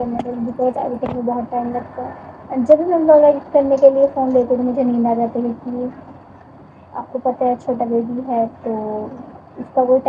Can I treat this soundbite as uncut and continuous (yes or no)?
yes